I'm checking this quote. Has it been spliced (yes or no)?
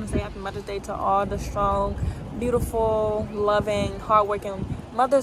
no